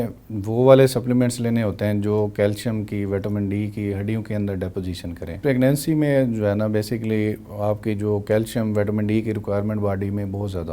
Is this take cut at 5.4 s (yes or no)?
yes